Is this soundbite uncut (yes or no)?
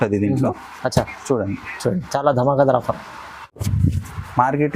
no